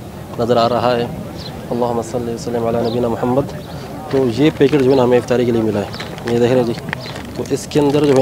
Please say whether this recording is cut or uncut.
uncut